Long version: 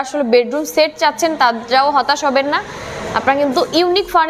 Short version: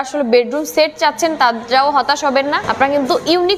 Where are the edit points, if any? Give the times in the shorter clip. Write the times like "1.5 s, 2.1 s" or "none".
2.7 s

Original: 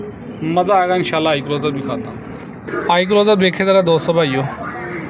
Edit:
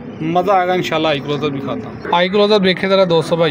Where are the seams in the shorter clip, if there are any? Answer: 2.0 s

